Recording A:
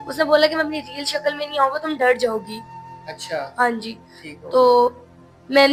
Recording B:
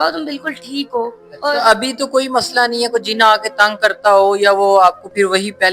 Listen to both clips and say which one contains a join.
B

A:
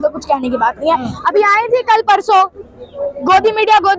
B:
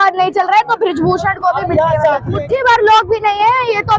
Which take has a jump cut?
B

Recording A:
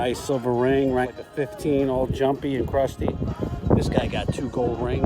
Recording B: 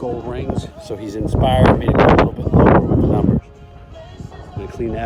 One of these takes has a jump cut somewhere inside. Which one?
A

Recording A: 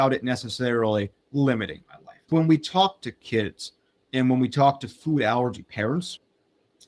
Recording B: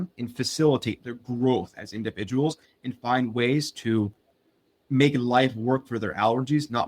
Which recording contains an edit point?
A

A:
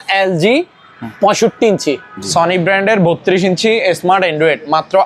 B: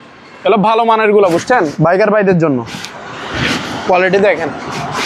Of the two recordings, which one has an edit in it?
A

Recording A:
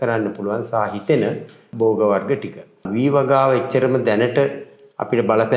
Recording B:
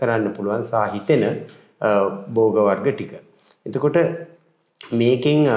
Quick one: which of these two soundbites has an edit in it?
A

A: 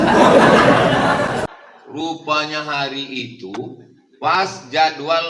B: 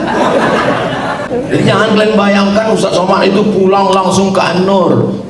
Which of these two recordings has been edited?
B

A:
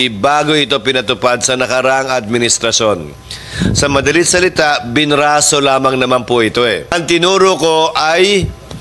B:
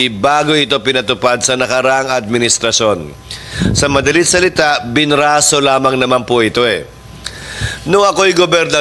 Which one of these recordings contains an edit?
A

